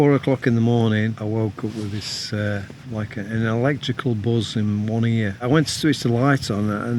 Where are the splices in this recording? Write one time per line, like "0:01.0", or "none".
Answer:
0:01.2
0:02.8
0:05.4

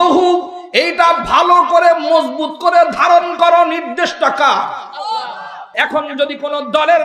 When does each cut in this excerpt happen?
0:05.7

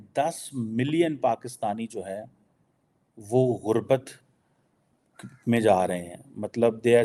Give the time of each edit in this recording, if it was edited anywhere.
none

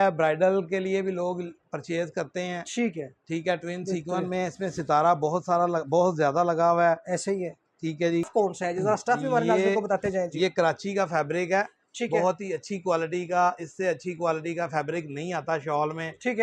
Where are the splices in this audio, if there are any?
0:08.3

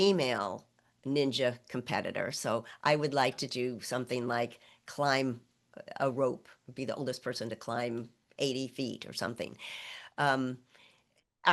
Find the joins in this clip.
none

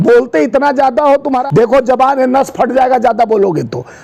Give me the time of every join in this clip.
0:01.3

